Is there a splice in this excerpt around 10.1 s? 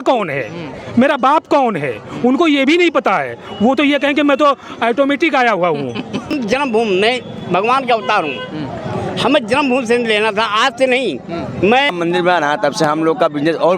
no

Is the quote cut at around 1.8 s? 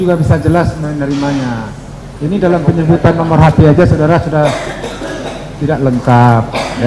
no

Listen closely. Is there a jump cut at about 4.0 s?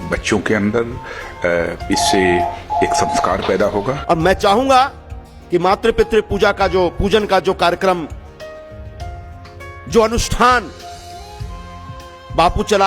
yes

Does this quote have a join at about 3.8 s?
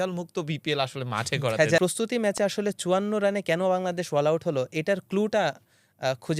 no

